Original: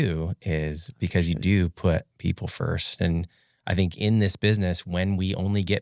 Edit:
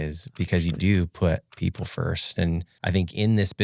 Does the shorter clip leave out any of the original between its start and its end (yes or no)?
yes